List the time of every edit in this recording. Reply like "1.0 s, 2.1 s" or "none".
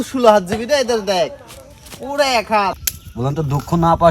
2.7 s